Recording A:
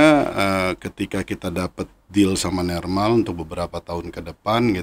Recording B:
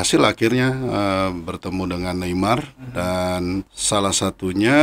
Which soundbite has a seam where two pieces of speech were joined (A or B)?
B